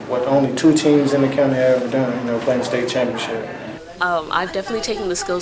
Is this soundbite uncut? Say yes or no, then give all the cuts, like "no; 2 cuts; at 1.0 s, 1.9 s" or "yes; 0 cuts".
no; 1 cut; at 3.7 s